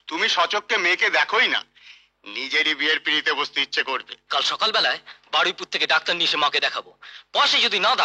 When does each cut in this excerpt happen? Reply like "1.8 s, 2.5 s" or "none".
4.3 s